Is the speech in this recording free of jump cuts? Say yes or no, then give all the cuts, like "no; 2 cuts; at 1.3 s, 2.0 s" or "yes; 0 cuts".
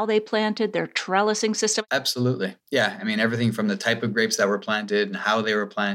no; 1 cut; at 1.8 s